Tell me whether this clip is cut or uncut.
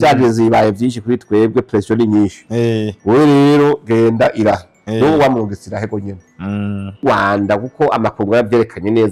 cut